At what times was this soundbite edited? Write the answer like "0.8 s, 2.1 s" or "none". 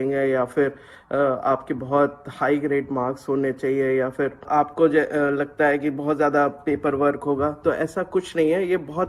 4.4 s